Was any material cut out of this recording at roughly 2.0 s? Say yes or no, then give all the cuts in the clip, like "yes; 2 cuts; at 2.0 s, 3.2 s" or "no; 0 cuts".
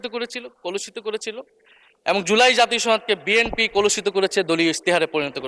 no; 0 cuts